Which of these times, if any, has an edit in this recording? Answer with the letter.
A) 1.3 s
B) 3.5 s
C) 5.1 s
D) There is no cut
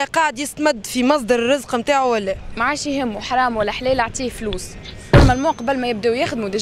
C